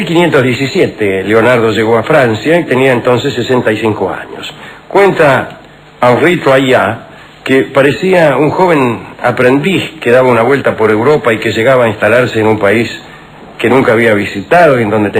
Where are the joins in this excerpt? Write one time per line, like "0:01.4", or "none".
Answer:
0:06.6